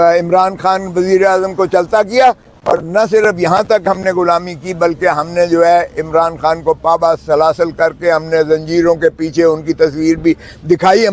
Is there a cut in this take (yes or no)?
no